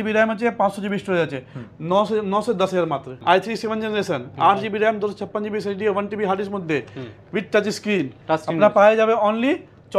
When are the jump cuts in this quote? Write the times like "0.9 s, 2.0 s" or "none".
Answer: 3.1 s